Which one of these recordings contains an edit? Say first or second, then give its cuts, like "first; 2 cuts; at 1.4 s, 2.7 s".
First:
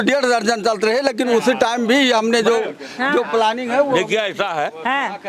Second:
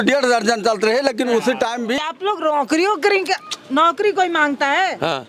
second; 1 cut; at 2.0 s